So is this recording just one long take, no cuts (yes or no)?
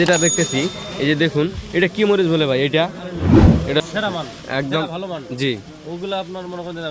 no